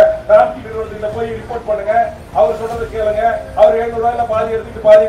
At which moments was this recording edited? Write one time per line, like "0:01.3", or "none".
none